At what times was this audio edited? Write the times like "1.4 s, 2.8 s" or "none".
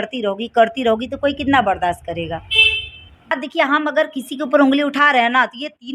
3.3 s